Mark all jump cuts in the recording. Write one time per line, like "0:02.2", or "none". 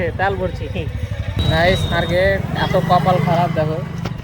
0:01.3